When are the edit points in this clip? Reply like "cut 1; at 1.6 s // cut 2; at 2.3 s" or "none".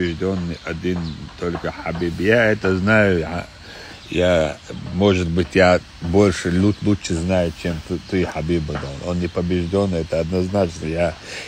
none